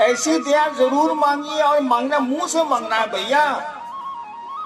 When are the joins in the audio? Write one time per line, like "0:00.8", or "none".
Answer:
0:03.8